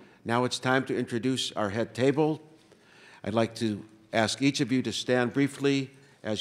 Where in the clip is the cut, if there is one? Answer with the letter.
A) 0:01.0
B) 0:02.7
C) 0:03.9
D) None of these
B